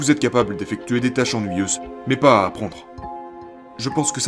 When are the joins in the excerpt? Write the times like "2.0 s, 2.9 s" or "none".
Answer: 1.9 s, 3.2 s